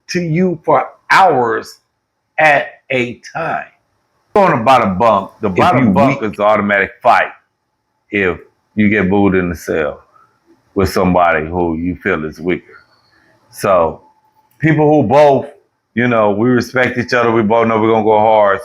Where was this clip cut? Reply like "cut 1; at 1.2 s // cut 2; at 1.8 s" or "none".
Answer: cut 1; at 4.4 s